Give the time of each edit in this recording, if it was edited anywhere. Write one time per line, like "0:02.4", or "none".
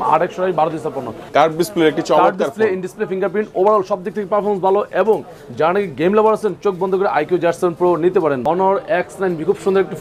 0:01.2
0:08.4